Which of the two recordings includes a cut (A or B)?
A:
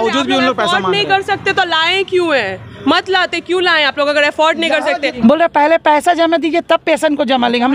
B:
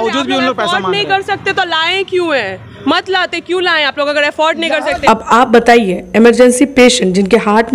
A